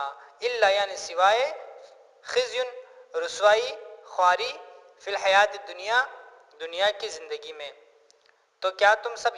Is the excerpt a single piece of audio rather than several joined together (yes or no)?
yes